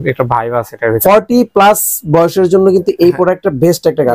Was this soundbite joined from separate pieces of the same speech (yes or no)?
yes